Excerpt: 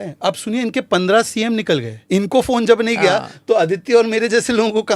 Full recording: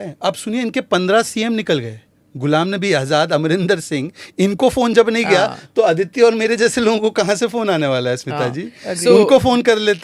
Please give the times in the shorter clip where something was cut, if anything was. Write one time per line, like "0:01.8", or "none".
0:01.9